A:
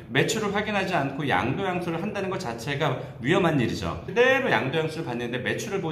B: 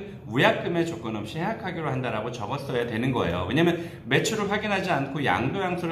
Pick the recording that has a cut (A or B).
A